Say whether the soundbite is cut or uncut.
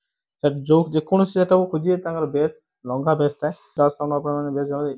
cut